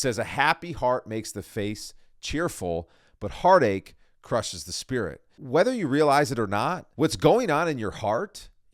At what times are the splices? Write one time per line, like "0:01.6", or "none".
0:05.3
0:06.8